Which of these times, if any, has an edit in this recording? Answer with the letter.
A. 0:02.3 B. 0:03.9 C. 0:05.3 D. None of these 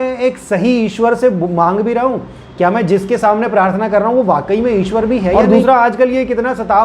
C